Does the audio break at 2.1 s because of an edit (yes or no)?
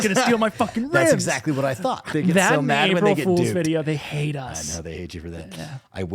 yes